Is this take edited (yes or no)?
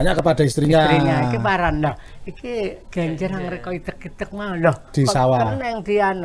no